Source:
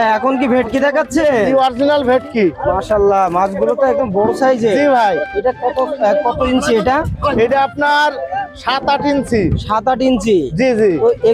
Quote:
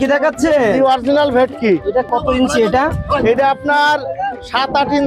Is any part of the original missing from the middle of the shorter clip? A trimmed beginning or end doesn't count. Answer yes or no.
yes